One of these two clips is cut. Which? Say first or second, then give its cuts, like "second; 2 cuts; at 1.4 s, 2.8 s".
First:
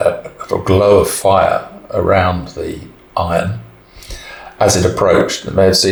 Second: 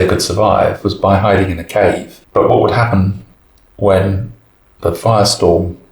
second; 1 cut; at 2.1 s